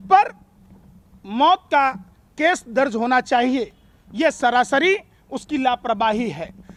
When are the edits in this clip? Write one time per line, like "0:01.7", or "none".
none